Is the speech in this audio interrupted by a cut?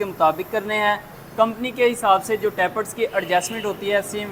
no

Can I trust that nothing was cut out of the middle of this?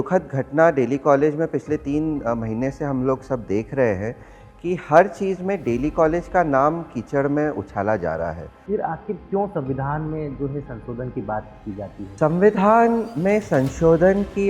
no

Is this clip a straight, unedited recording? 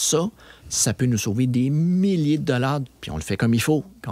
no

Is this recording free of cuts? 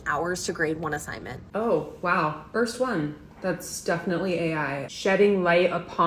no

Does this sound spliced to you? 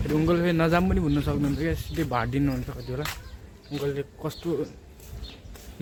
no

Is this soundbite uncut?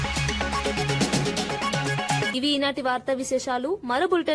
yes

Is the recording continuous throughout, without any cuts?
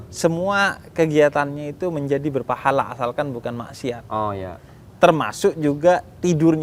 yes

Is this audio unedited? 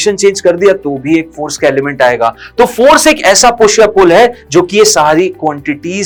yes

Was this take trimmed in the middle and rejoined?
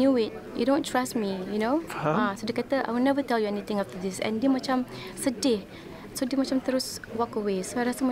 no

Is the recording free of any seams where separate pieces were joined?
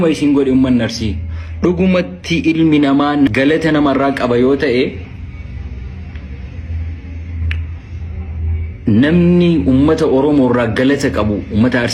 yes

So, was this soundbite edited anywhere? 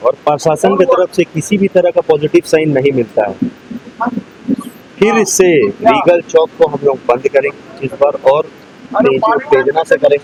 no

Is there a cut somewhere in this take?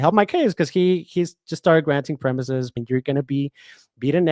yes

